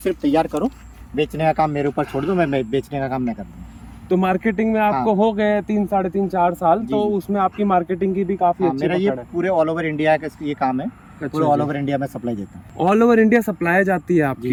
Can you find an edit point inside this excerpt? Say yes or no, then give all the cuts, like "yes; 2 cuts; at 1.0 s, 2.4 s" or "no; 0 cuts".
no; 0 cuts